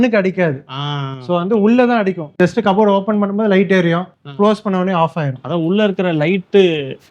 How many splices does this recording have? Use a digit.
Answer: 2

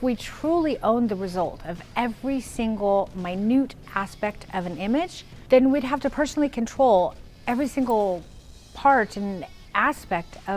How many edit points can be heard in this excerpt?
1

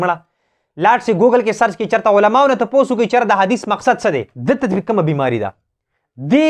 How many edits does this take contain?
1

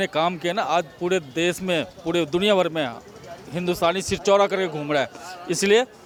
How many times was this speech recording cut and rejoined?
0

